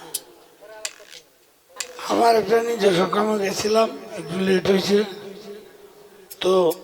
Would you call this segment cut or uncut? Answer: cut